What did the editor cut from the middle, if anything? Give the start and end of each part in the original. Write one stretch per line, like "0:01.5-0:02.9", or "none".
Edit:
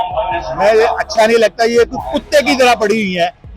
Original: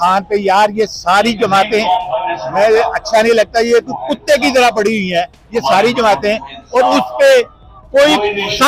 none